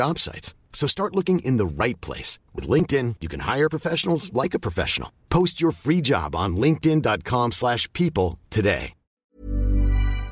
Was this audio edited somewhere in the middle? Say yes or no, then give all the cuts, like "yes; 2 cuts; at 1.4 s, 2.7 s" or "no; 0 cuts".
yes; 1 cut; at 9.1 s